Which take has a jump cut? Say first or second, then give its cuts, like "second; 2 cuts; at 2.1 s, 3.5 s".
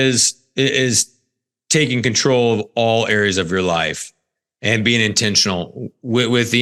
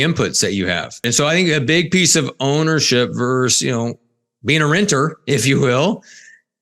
second; 1 cut; at 1.1 s